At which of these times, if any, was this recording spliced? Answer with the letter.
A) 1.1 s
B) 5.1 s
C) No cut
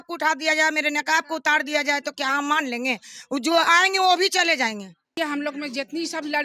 B